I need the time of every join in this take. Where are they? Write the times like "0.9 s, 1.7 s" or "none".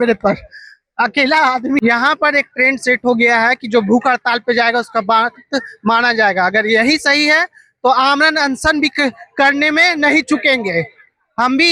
1.8 s

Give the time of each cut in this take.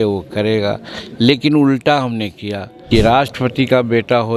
2.7 s

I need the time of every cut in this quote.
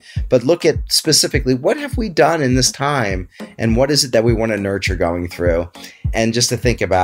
6.1 s

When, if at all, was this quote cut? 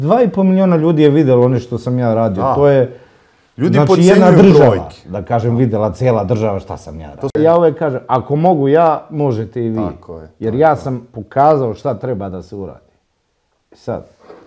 7.3 s

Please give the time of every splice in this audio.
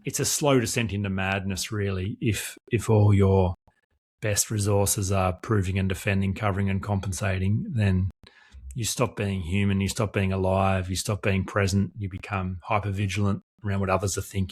none

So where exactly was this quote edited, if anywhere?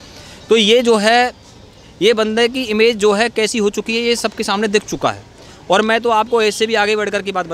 none

